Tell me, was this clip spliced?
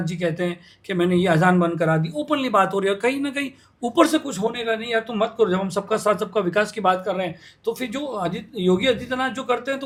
no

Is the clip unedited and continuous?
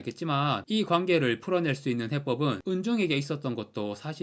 yes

